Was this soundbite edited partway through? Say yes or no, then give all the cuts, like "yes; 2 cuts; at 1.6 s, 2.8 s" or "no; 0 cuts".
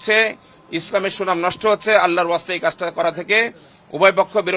no; 0 cuts